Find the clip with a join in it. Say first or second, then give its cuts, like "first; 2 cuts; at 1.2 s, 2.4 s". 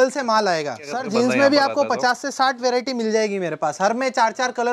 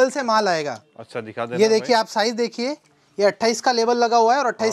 first; 1 cut; at 1.0 s